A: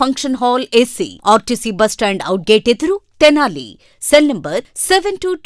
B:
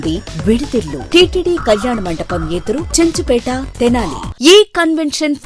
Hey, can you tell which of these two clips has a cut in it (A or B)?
B